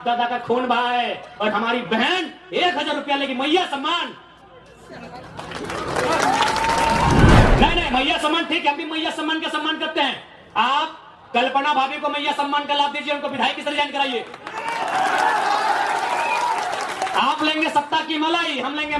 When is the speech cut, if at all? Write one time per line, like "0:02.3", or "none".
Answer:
0:07.4